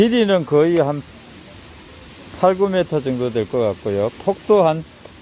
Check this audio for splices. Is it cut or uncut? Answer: uncut